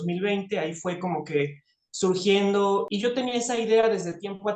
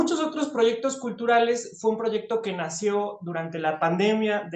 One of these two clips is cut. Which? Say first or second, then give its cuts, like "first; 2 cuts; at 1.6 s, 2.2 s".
first; 1 cut; at 2.9 s